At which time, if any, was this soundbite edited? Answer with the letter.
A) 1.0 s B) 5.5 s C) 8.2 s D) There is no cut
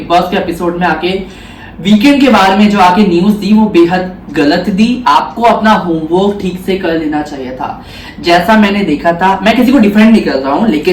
D